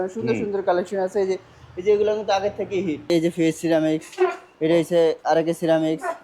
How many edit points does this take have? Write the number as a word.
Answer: one